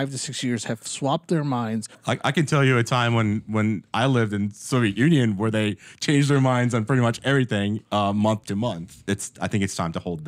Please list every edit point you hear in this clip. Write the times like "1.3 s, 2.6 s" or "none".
2.0 s, 8.9 s